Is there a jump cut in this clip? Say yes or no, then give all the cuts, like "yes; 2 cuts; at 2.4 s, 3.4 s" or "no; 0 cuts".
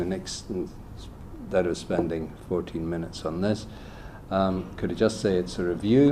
no; 0 cuts